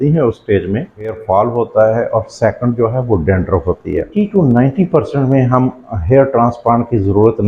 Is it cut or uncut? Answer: cut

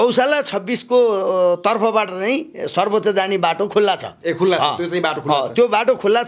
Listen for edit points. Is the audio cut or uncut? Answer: uncut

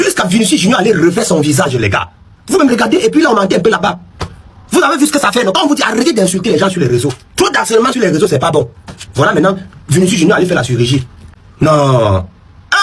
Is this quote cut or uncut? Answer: uncut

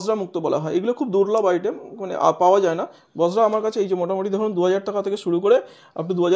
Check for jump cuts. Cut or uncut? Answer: uncut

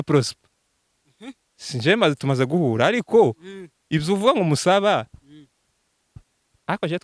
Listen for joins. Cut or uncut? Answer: uncut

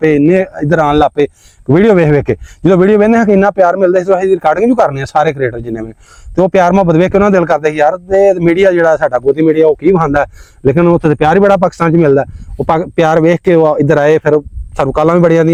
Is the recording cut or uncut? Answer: uncut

